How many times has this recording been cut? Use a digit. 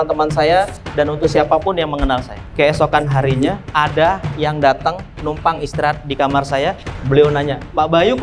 2